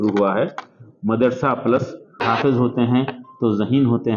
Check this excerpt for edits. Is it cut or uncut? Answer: cut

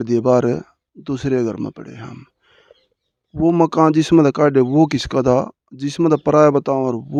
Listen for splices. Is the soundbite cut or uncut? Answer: uncut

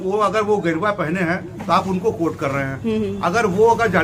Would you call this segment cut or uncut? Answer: uncut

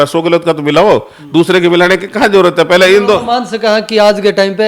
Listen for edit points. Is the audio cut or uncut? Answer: uncut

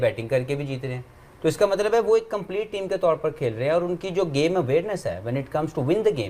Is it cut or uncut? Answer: uncut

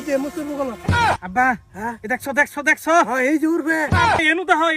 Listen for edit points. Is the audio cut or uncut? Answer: cut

